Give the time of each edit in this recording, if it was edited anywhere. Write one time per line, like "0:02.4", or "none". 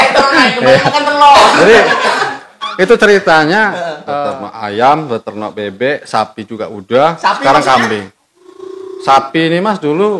0:04.0